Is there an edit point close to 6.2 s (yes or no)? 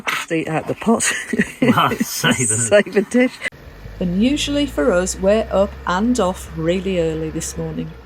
no